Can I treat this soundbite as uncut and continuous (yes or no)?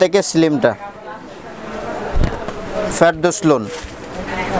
no